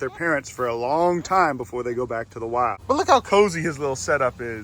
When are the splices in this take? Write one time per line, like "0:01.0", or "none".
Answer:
none